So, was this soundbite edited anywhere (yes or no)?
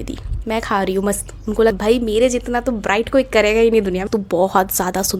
yes